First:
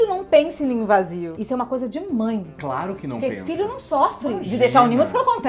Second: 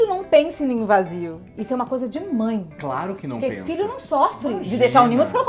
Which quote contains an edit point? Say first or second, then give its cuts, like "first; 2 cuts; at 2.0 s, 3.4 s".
first; 1 cut; at 1.3 s